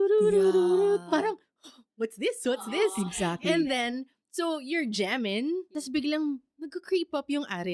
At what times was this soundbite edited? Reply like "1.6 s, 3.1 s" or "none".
5.9 s